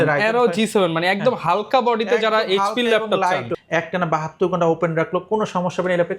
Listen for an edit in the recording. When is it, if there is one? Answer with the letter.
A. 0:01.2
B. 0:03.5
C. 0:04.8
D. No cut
B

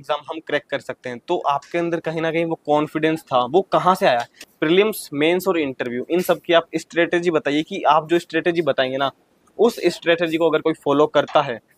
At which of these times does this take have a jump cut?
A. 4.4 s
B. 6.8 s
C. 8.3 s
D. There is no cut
A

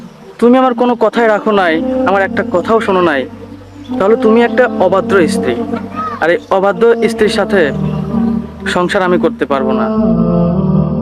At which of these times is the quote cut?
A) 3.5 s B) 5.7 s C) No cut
C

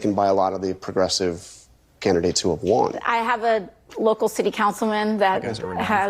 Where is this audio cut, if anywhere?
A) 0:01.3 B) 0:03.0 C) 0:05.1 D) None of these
B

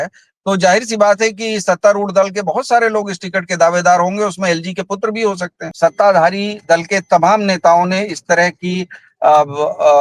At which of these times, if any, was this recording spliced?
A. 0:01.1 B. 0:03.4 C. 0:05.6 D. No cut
C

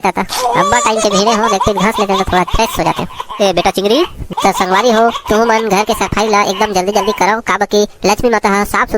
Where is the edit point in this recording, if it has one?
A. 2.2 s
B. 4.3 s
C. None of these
B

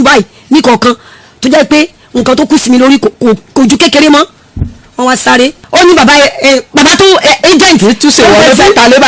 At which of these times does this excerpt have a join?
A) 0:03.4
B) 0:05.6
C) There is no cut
B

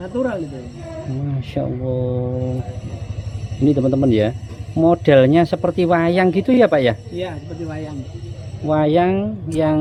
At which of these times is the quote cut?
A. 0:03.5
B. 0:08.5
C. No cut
C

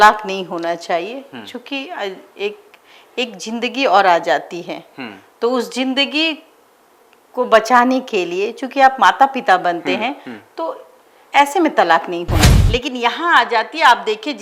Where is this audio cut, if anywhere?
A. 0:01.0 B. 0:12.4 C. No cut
B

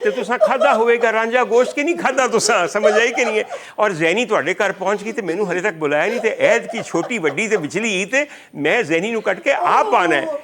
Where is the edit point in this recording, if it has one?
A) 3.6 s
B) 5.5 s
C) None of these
C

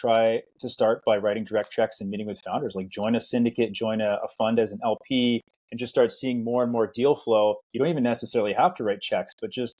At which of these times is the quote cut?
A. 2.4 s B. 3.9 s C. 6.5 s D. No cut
D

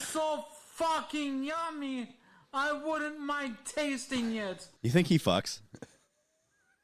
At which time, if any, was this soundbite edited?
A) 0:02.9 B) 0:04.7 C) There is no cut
B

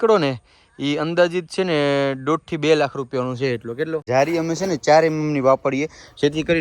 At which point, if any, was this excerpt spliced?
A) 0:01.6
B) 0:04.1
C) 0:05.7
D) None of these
B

